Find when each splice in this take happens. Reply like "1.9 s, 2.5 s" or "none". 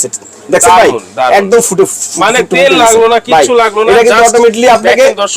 none